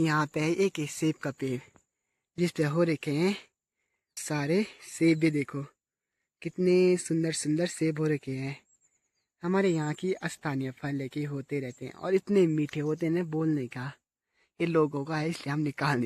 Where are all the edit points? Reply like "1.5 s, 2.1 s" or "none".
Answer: none